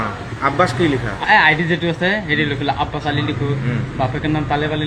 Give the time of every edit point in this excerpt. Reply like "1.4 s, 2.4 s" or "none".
none

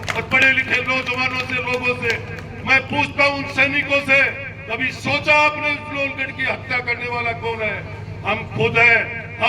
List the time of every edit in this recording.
none

